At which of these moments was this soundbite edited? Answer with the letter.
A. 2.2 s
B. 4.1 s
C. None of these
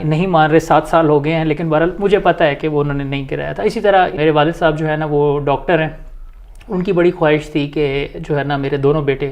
B